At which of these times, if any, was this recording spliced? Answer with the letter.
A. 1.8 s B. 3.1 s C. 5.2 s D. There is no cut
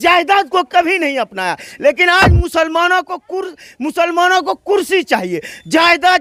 D